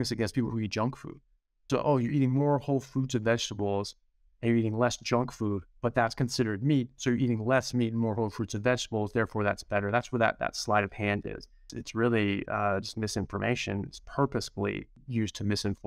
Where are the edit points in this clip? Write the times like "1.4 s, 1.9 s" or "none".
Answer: 1.7 s, 11.8 s, 14.9 s